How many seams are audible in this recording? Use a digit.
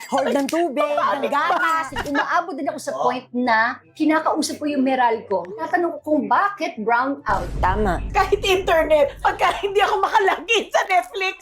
4